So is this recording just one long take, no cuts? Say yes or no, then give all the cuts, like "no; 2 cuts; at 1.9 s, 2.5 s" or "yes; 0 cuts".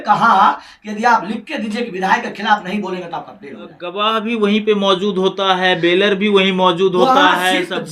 no; 1 cut; at 3.9 s